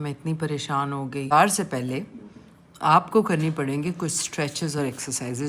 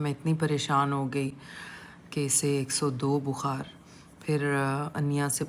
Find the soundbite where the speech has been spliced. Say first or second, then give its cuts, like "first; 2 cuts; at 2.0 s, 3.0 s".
first; 1 cut; at 1.3 s